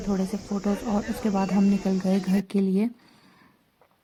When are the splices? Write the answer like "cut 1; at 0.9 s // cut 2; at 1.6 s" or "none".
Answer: none